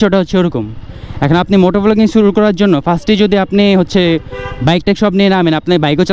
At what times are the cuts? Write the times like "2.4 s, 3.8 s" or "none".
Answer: none